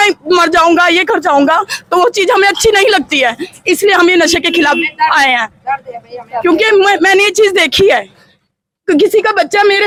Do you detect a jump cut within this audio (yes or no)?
no